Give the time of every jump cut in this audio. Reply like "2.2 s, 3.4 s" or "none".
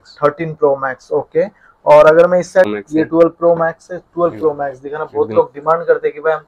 2.7 s